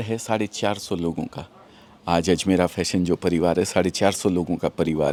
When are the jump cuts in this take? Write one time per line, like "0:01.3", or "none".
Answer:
none